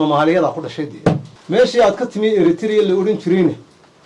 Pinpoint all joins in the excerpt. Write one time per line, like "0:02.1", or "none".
0:01.3